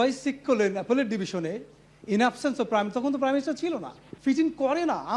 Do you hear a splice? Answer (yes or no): yes